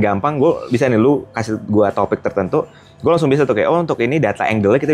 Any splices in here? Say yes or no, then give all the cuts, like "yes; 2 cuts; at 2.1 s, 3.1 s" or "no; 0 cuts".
no; 0 cuts